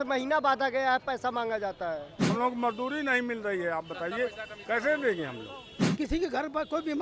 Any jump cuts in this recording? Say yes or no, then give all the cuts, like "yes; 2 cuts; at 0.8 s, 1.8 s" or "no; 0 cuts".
yes; 2 cuts; at 2.3 s, 5.8 s